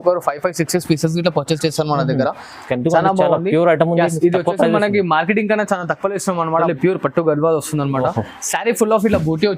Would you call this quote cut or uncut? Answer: cut